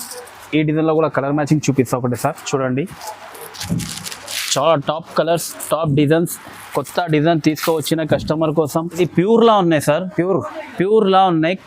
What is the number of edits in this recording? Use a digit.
1